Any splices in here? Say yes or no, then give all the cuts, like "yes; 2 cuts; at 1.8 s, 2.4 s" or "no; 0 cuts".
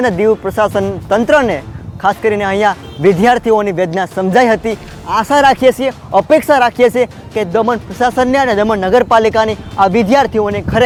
no; 0 cuts